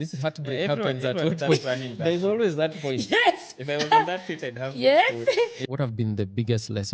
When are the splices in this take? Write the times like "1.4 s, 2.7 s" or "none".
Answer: 5.6 s